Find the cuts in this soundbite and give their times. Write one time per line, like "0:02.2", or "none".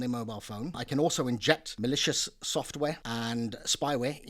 0:00.8
0:01.7
0:03.0